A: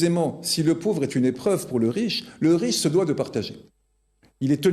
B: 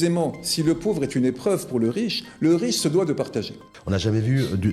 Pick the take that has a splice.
B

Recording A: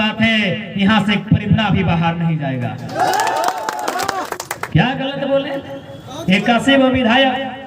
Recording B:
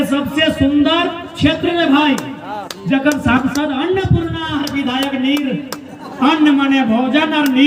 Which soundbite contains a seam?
A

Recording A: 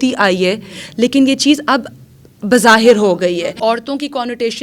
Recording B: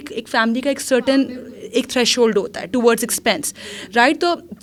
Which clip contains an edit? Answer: A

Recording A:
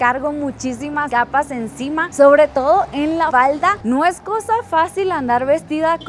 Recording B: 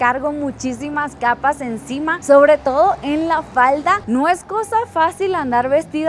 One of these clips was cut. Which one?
A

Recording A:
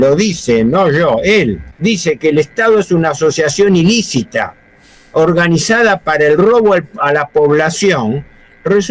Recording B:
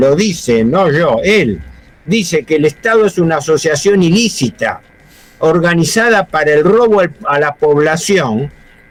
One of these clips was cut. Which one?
A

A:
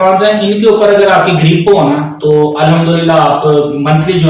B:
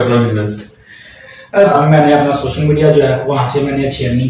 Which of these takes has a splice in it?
B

